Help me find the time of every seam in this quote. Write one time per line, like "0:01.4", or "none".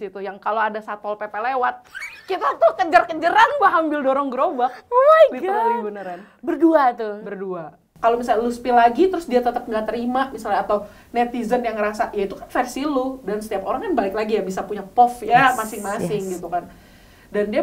0:07.8